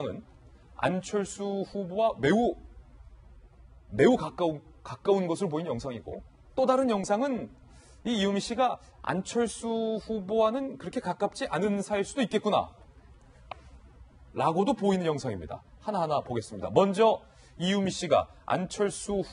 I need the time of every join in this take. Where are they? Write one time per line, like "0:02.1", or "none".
none